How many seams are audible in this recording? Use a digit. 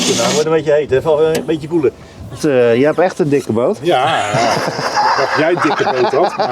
1